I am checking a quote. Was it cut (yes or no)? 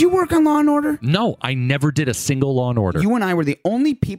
yes